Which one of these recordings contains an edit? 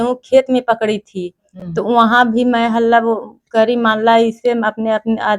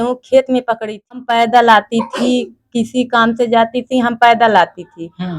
second; 1 cut; at 1.2 s

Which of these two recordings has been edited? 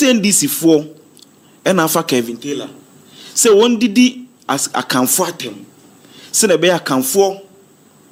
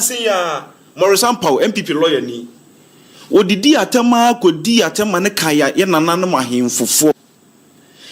second; 2 cuts; at 5.7 s, 7.1 s

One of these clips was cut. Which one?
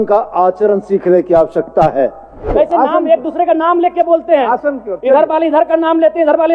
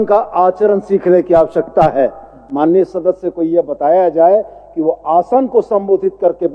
first; 1 cut; at 2.5 s

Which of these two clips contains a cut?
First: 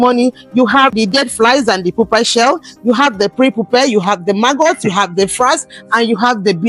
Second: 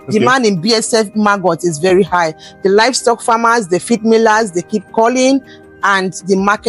first; 1 cut; at 0.9 s

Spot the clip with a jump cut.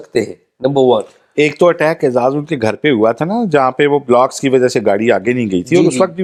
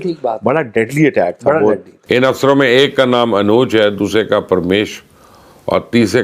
second; 1 cut; at 1.9 s

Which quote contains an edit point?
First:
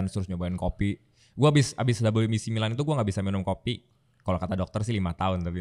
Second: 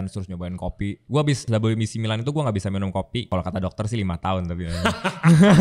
second; 2 cuts; at 1.4 s, 3.2 s

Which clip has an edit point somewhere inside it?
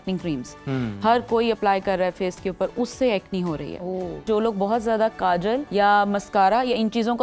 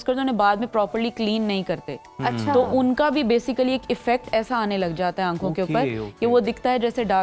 first; 2 cuts; at 4.2 s, 5.7 s

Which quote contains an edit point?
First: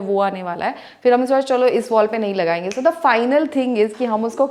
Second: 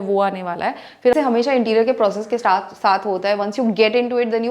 second; 1 cut; at 1.1 s

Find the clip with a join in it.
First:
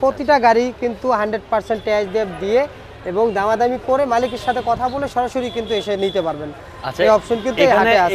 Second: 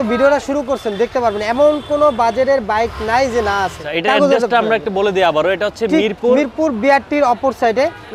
second; 1 cut; at 3.8 s

